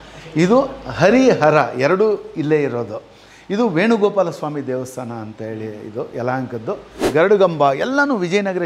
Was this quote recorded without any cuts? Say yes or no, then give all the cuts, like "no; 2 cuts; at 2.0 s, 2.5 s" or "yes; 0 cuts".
no; 1 cut; at 7.1 s